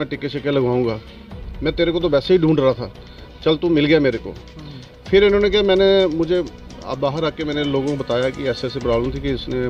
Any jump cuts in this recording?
no; 0 cuts

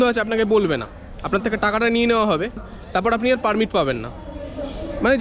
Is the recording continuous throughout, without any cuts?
no; 1 cut; at 2.7 s

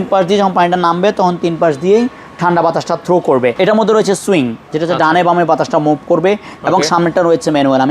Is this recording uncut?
no; 1 cut; at 3.5 s

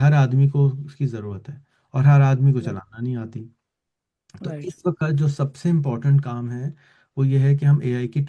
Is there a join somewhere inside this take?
no; 0 cuts

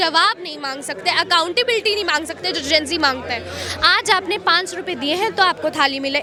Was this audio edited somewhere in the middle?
no; 0 cuts

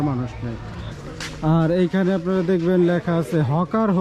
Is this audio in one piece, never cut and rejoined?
no; 1 cut; at 0.9 s

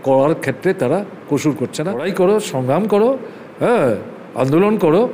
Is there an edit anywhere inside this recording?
yes; 1 cut; at 2.1 s

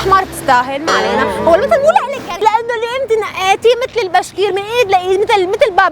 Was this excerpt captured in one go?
no; 1 cut; at 2.4 s

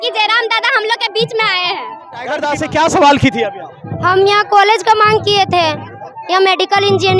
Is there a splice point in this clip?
yes; 1 cut; at 2.3 s

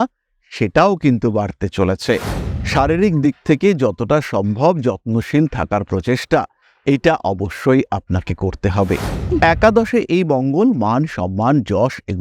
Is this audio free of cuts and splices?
no; 1 cut; at 2.4 s

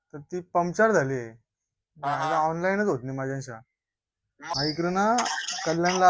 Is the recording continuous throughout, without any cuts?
no; 1 cut; at 4.5 s

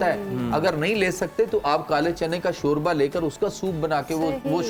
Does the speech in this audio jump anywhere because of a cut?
no; 0 cuts

